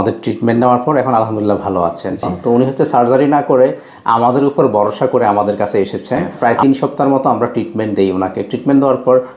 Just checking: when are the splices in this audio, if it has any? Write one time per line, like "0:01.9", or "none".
0:02.3
0:06.3